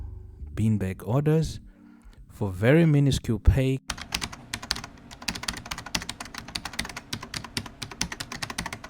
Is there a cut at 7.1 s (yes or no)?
no